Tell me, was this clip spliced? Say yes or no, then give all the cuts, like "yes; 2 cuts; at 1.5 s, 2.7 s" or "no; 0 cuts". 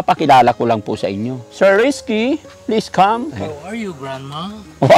yes; 2 cuts; at 1.4 s, 3.3 s